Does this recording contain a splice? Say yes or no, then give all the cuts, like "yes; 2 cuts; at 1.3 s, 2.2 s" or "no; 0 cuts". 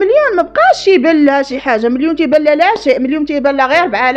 no; 0 cuts